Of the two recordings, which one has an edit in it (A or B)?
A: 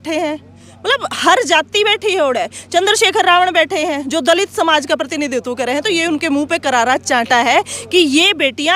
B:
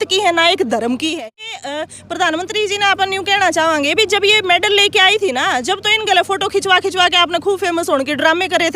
B